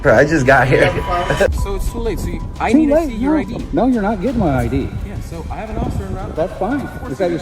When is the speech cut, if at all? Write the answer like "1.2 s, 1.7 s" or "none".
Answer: 1.5 s